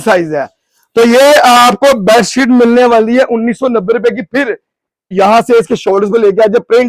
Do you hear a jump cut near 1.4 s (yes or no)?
no